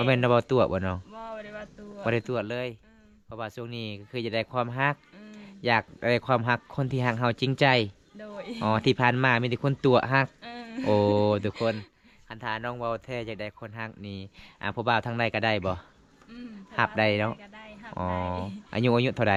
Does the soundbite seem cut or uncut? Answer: uncut